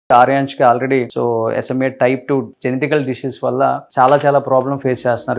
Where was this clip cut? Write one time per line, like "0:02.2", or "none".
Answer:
0:01.1
0:02.5